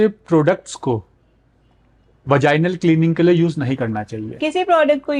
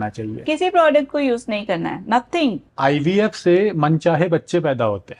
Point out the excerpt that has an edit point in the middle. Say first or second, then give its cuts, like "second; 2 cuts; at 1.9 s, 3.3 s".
second; 1 cut; at 2.7 s